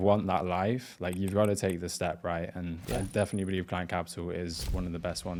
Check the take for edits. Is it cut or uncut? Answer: uncut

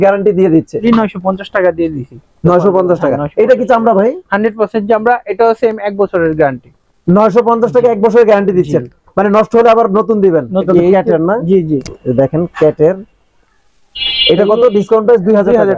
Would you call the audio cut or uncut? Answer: cut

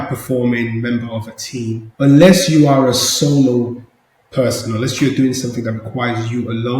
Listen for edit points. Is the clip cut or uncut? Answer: cut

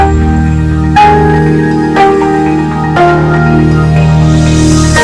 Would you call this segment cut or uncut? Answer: uncut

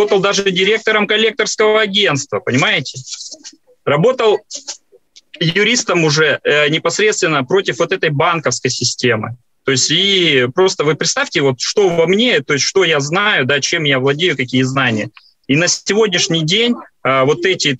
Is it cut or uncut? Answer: uncut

